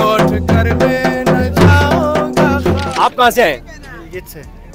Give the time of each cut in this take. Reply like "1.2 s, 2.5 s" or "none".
2.8 s